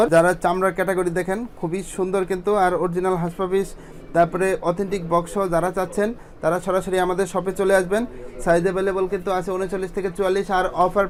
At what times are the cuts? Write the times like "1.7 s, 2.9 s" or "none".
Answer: none